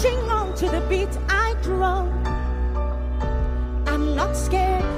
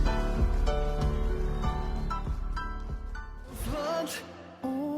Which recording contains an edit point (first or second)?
second